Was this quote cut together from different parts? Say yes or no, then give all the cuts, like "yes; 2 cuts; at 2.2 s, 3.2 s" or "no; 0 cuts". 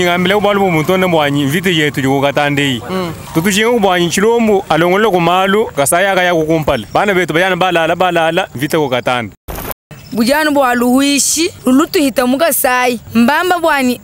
yes; 8 cuts; at 3.2 s, 4.6 s, 5.7 s, 6.8 s, 8.5 s, 9.8 s, 11.5 s, 13.0 s